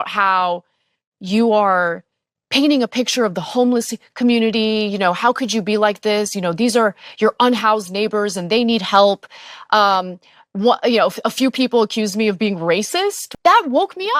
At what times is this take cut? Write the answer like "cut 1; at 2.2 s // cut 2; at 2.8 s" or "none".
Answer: cut 1; at 13.3 s